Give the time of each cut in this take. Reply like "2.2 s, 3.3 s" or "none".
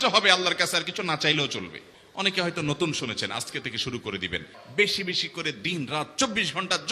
1.9 s, 4.6 s